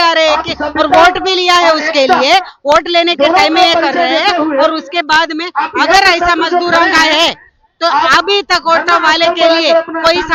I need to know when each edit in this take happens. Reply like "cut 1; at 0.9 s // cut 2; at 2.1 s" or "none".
none